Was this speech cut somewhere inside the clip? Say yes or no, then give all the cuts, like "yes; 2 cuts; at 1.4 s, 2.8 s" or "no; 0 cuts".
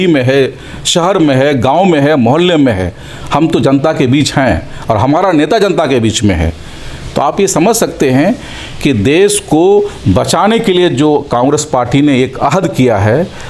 no; 0 cuts